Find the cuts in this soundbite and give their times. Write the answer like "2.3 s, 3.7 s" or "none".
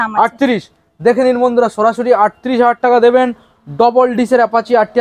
none